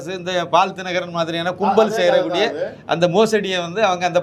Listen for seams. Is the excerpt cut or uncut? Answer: uncut